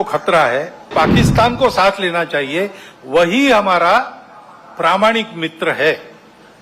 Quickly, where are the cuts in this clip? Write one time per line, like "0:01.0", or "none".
0:00.9